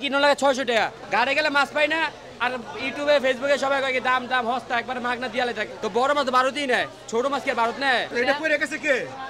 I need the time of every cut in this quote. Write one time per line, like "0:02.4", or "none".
0:01.0
0:05.7
0:08.1